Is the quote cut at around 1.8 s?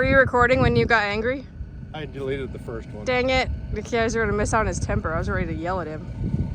yes; 1 cut; at 1.8 s

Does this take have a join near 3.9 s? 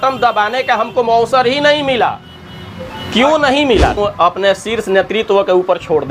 yes; 1 cut; at 3.9 s

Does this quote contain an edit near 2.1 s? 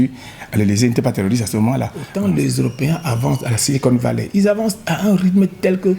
yes; 1 cut; at 2.1 s

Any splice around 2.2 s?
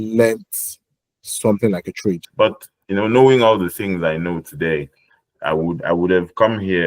yes; 1 cut; at 2.2 s

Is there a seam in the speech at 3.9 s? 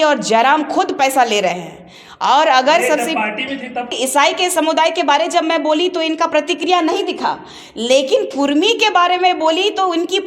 yes; 1 cut; at 3.9 s

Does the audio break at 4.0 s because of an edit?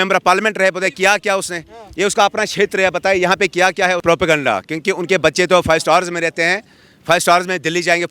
yes; 1 cut; at 4.0 s

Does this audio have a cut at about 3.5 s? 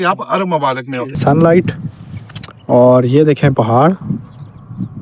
no; 1 cut; at 1.1 s

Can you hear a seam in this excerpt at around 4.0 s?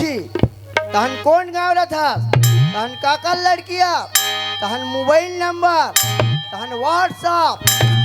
no; 0 cuts

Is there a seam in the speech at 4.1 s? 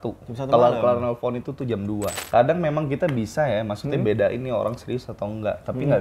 no; 1 cut; at 2.1 s

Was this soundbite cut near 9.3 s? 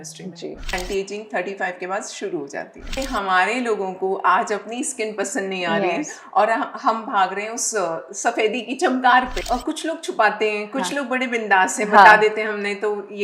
yes; 3 cuts; at 0.7 s, 2.9 s, 9.3 s

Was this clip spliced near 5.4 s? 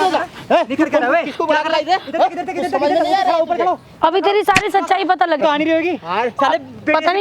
yes; 1 cut; at 5.4 s

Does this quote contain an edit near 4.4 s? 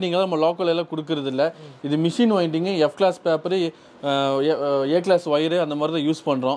no; 0 cuts

